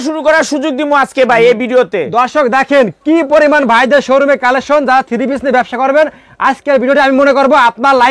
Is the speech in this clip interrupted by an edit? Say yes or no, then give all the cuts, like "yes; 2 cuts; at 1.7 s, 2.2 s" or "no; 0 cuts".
no; 0 cuts